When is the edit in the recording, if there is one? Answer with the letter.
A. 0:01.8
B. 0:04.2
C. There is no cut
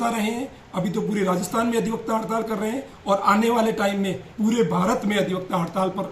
B